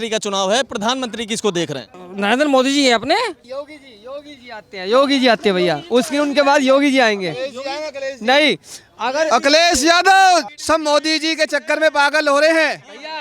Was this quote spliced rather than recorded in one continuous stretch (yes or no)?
yes